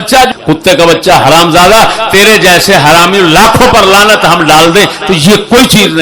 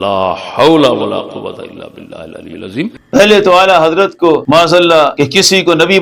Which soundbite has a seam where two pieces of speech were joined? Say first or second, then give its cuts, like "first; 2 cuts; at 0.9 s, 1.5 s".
second; 3 cuts; at 2.9 s, 4.4 s, 5.1 s